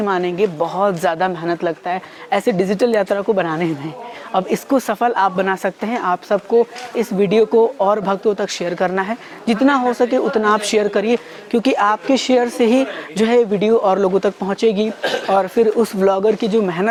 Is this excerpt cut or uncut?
uncut